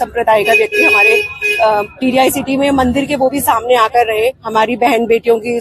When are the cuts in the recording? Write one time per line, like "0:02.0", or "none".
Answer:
0:04.4